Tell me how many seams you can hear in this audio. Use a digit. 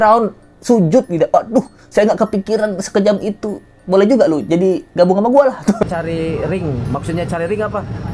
1